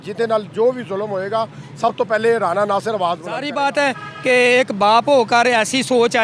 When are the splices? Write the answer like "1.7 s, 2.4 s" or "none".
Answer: 3.5 s